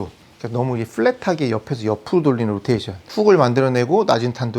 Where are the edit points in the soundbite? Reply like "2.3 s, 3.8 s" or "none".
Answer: 3.0 s